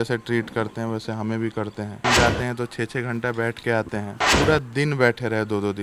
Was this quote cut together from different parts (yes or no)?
yes